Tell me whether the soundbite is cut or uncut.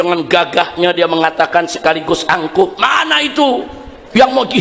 uncut